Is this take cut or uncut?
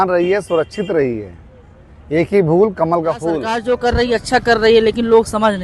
cut